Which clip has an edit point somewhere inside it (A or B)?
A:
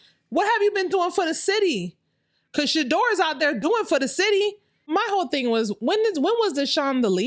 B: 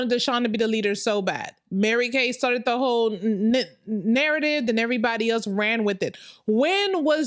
A